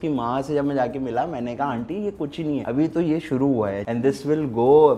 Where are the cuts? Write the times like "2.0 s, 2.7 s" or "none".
2.6 s, 3.8 s